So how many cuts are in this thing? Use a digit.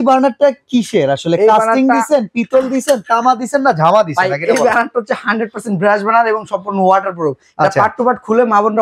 0